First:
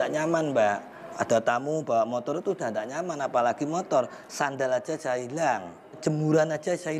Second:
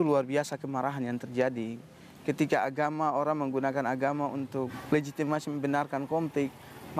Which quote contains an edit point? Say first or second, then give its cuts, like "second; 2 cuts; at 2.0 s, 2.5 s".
first; 1 cut; at 6.0 s